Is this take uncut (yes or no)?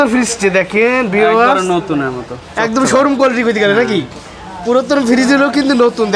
yes